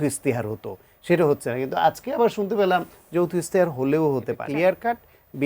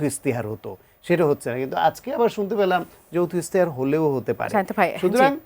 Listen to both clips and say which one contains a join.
first; 1 cut; at 4.4 s

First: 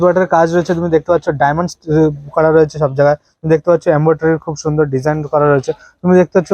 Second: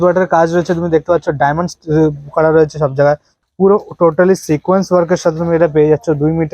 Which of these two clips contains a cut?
second; 1 cut; at 3.3 s

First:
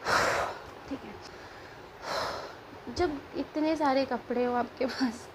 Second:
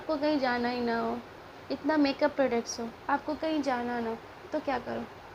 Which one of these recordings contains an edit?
first; 1 cut; at 1.1 s

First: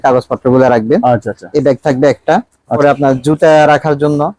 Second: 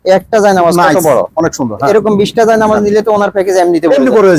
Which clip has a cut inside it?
first; 1 cut; at 2.8 s

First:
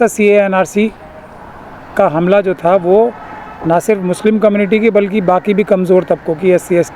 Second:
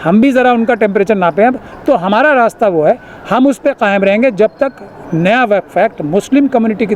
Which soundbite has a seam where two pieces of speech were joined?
second; 1 cut; at 1.7 s

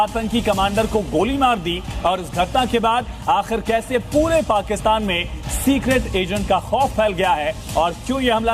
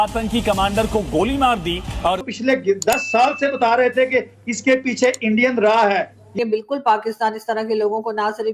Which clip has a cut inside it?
second; 2 cuts; at 2.3 s, 6.3 s

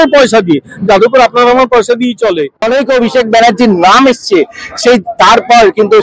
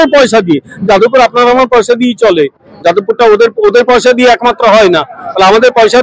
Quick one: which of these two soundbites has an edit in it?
first; 1 cut; at 2.6 s

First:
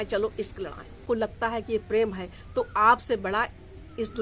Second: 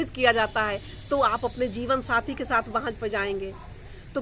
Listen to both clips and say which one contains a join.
first; 1 cut; at 1.0 s

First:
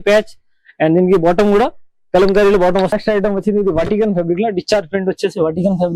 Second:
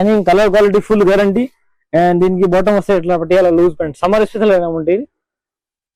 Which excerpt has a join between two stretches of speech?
first; 1 cut; at 2.9 s

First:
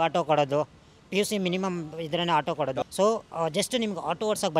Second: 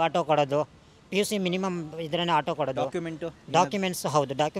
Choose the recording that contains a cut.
first; 1 cut; at 2.9 s

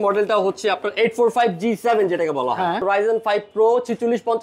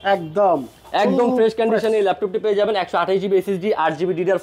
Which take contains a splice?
first; 1 cut; at 2.8 s

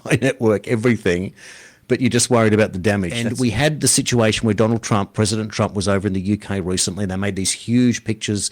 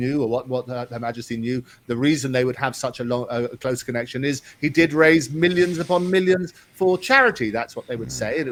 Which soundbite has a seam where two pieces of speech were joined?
first; 1 cut; at 3.2 s

